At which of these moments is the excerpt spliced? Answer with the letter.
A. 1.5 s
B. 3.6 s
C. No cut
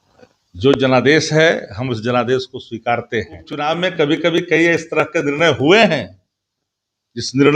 B